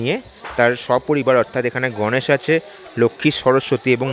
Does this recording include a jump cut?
no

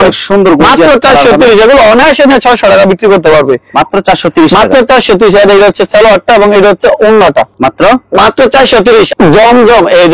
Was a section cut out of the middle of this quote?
no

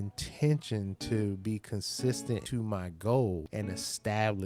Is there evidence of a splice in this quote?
yes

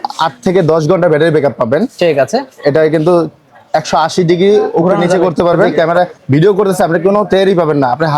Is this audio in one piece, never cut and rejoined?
no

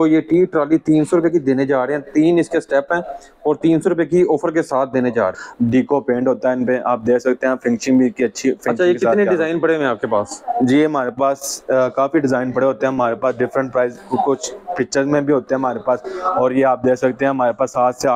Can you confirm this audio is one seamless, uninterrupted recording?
no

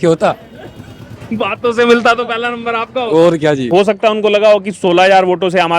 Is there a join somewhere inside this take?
yes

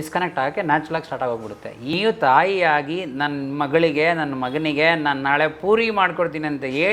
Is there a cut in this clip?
yes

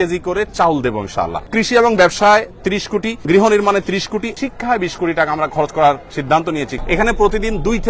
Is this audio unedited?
no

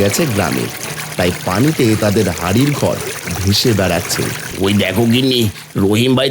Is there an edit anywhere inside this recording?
yes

